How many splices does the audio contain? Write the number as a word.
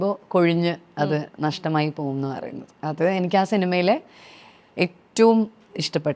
zero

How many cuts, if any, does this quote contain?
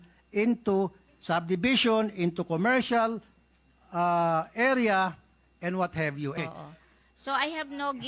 one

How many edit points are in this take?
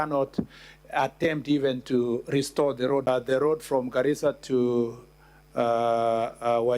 one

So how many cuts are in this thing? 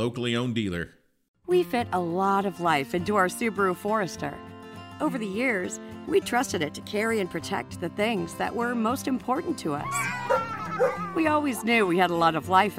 one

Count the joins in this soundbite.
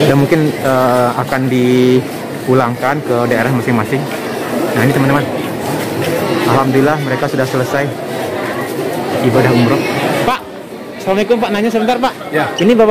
one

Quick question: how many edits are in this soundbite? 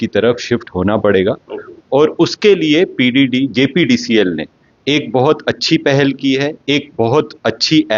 zero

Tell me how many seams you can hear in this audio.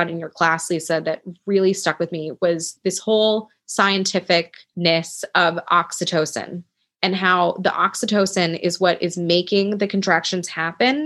two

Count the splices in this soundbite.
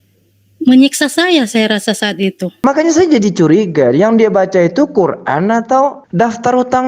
one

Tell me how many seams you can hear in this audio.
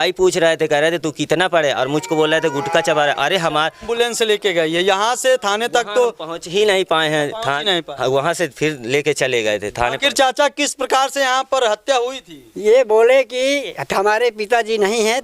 one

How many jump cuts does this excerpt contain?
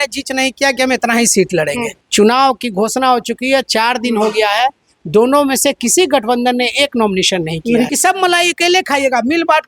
two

